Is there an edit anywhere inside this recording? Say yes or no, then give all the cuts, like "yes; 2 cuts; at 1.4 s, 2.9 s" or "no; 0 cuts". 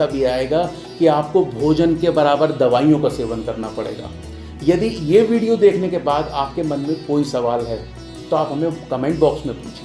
no; 0 cuts